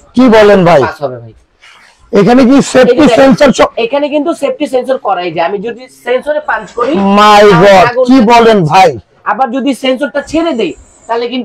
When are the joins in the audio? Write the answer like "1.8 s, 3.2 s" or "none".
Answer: none

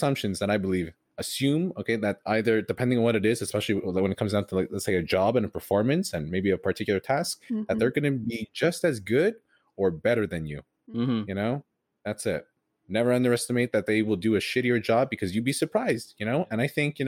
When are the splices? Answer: 1.0 s

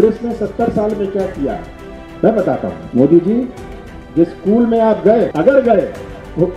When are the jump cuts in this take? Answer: 2.8 s, 5.3 s

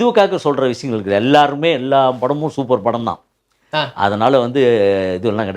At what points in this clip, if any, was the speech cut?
none

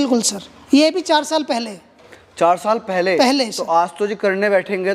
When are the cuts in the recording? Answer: none

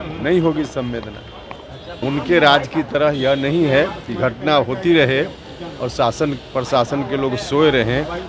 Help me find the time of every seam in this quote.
1.9 s

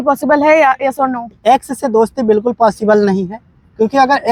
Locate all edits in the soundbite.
none

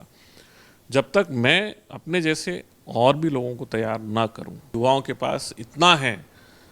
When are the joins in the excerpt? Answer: 4.6 s

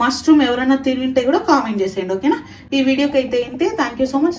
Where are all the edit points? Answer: none

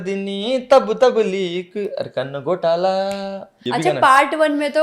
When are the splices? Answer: 3.6 s

